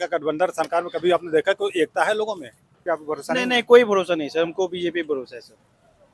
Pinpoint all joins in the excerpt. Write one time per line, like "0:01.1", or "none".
0:02.8

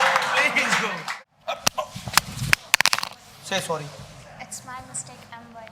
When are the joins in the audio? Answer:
0:01.0

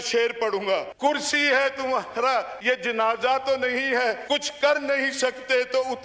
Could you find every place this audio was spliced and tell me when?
0:00.9
0:02.5
0:04.2

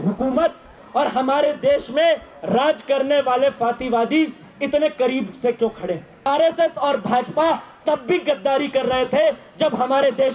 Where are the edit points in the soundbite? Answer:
0:06.1

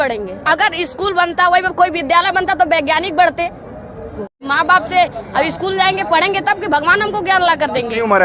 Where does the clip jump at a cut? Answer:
0:04.3

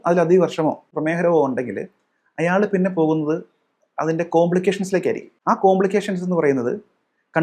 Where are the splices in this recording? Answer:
0:00.9
0:05.3

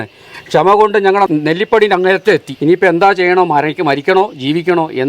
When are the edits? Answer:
0:01.3
0:02.5

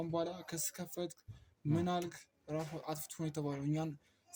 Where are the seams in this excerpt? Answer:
none

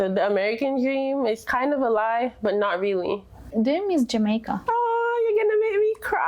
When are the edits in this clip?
0:03.5
0:04.5

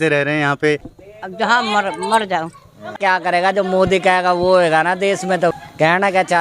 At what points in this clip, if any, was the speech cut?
0:00.9
0:02.9
0:05.5

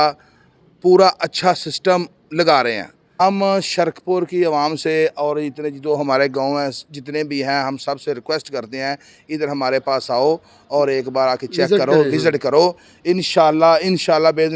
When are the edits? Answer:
0:03.1

